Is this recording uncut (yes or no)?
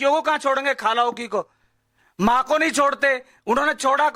yes